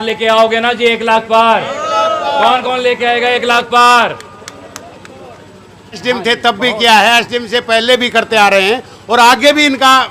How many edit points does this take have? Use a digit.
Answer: 1